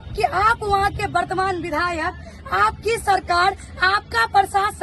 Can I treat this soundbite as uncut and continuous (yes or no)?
yes